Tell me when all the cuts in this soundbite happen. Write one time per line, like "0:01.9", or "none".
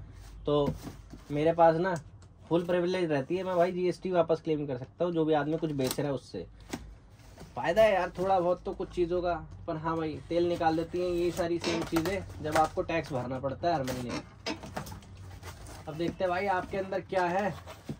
none

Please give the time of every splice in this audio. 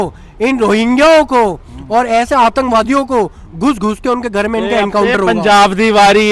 none

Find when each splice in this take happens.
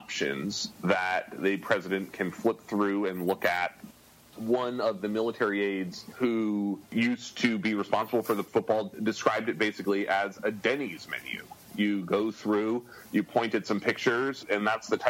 0:06.0
0:06.8
0:08.5

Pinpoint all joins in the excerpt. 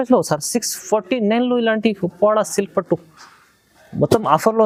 none

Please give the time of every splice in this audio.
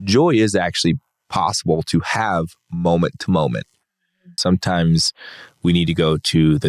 0:04.3

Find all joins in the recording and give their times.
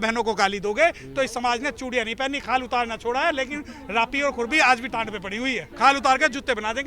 0:05.7

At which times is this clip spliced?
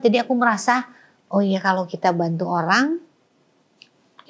none

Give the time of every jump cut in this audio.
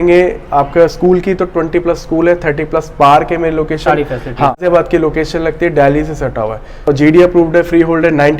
0:04.6
0:06.9

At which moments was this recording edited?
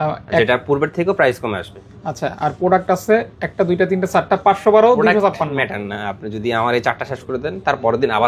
none

